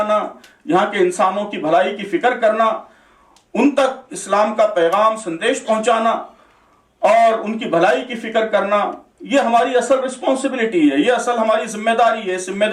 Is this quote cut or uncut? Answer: uncut